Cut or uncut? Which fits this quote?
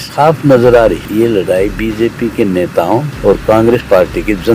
cut